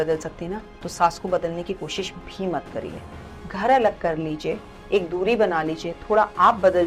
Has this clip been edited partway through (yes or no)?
no